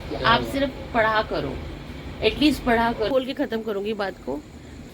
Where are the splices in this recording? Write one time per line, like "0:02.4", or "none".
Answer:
0:03.1